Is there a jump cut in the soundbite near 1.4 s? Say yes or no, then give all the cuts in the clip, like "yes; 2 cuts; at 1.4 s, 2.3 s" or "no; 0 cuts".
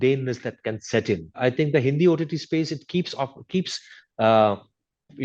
yes; 1 cut; at 1.4 s